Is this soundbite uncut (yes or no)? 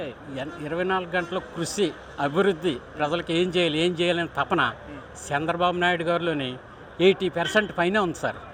yes